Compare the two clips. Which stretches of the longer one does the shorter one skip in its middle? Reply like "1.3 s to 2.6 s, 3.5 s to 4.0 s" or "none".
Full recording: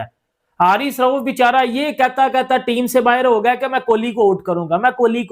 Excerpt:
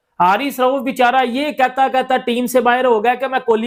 none